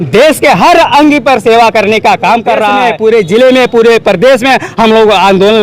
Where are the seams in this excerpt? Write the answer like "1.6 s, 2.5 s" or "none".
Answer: 2.9 s